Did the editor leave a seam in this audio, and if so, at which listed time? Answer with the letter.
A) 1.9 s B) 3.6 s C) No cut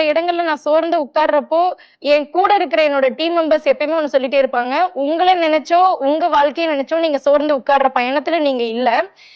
A